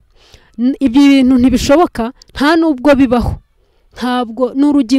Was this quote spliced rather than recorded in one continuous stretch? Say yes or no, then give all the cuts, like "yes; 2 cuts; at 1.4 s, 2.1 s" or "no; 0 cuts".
no; 0 cuts